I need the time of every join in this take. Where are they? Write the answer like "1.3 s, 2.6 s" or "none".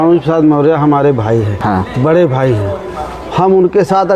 1.5 s